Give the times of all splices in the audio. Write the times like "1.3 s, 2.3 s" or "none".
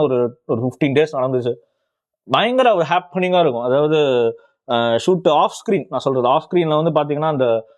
none